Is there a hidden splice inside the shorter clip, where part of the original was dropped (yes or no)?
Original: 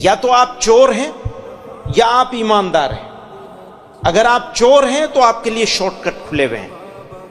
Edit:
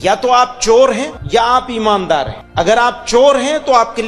yes